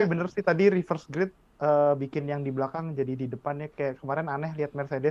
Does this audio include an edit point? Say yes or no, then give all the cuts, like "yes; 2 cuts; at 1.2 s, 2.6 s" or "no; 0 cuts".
no; 0 cuts